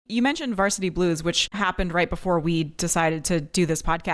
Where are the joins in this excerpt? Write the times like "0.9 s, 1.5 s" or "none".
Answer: 1.6 s